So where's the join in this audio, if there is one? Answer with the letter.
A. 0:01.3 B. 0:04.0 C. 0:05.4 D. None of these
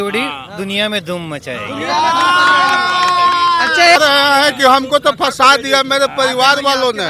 B